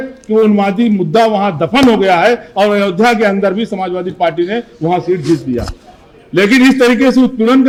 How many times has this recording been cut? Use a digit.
0